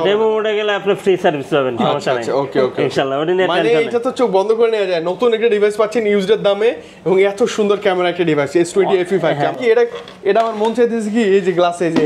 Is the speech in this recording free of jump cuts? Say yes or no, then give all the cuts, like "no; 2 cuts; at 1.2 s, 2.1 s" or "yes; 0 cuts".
no; 1 cut; at 9.5 s